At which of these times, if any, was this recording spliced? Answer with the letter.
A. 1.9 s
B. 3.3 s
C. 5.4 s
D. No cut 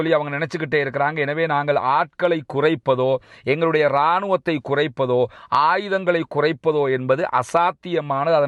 D